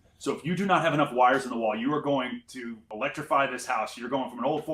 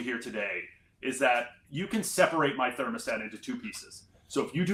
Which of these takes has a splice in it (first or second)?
first